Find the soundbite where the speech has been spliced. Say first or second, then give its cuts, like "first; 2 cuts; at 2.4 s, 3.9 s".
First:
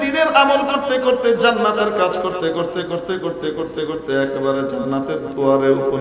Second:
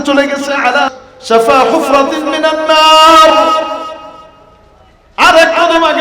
second; 1 cut; at 0.9 s